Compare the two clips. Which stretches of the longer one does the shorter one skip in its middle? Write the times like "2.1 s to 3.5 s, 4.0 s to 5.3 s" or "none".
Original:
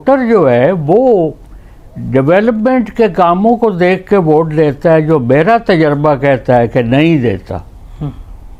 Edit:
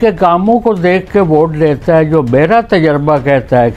none